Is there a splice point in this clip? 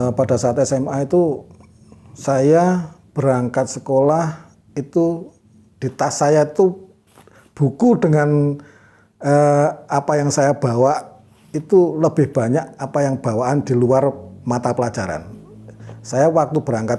no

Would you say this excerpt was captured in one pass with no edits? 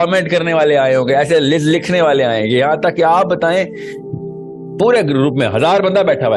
yes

